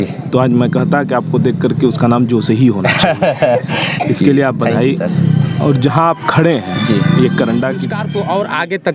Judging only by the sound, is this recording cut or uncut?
cut